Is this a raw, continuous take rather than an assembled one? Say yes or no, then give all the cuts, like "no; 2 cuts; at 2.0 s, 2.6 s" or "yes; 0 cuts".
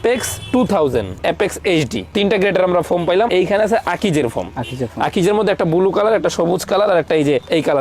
no; 2 cuts; at 1.2 s, 3.3 s